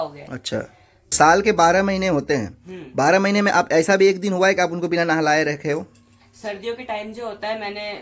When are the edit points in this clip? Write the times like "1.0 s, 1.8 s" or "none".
1.1 s